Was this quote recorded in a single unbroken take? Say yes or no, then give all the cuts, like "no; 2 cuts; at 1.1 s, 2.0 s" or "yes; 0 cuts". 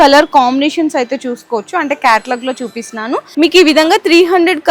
yes; 0 cuts